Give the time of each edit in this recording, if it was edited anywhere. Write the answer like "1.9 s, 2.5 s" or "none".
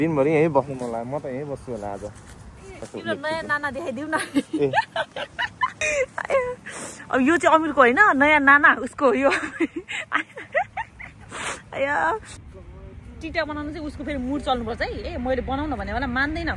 2.8 s, 5.8 s, 12.3 s